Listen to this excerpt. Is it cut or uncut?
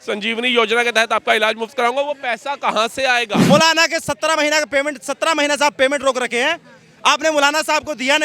cut